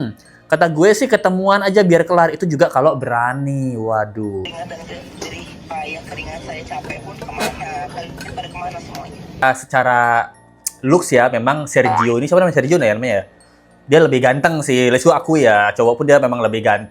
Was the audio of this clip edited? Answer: yes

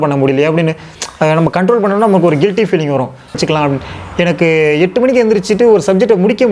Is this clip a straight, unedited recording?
no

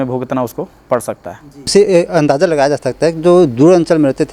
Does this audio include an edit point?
yes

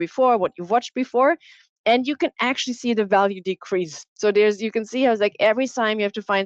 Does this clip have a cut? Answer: no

